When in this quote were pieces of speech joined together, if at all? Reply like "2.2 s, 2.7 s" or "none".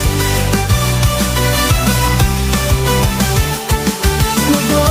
none